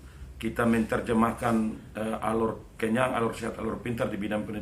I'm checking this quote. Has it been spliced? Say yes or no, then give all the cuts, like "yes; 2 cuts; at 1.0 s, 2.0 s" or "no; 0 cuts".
no; 0 cuts